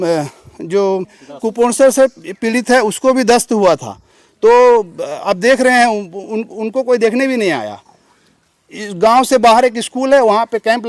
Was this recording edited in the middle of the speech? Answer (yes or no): yes